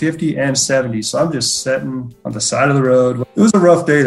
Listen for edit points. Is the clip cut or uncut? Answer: cut